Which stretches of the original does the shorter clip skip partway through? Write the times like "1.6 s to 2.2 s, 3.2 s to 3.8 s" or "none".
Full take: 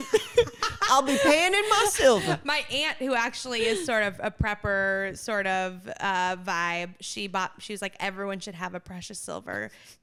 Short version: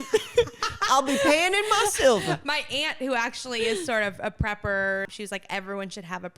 5.1 s to 7.6 s